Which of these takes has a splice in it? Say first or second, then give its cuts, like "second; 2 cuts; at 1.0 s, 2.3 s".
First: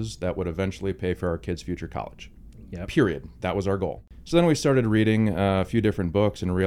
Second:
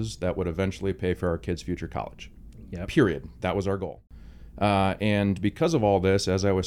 first; 1 cut; at 4.1 s